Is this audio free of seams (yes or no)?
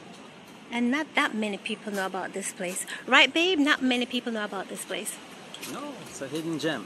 yes